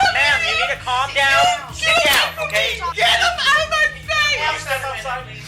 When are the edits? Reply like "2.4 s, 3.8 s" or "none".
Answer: 2.9 s